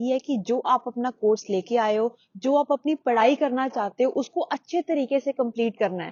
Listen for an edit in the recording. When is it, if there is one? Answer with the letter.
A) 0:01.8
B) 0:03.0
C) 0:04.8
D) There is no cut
D